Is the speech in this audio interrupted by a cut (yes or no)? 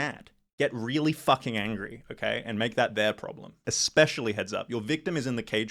yes